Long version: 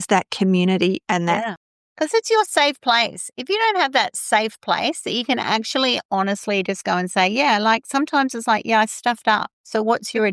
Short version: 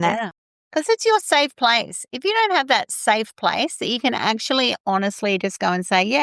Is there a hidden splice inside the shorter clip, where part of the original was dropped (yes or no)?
no